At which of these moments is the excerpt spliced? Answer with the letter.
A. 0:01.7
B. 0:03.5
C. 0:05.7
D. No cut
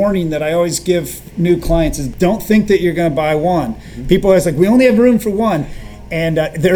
D